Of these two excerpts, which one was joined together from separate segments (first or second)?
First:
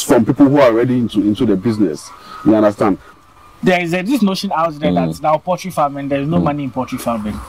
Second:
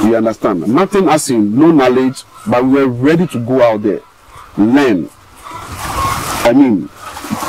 first